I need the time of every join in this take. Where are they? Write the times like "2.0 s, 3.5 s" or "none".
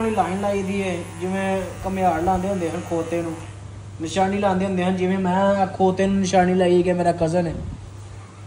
none